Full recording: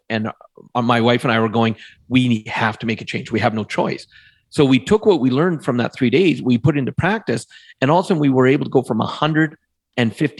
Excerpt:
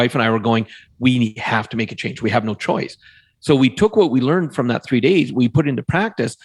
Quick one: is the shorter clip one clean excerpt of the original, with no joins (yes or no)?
yes